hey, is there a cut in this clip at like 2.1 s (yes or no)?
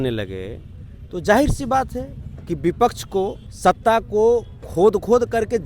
no